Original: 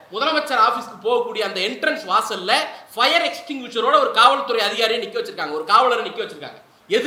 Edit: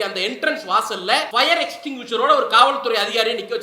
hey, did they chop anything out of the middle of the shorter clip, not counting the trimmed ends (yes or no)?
yes